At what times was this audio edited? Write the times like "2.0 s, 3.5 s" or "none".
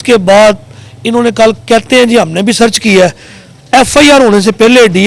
none